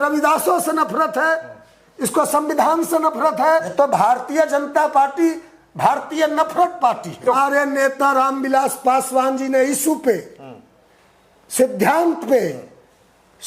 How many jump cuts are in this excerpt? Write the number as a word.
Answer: two